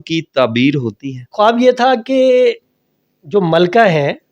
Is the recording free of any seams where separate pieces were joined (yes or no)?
no